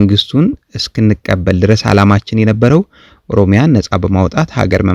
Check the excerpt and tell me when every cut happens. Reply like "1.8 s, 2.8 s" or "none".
none